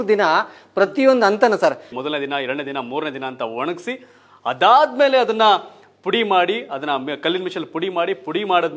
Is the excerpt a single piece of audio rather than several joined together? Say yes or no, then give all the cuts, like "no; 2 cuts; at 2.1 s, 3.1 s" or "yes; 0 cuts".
no; 1 cut; at 1.9 s